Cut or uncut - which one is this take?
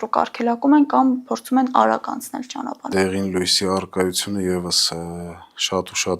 cut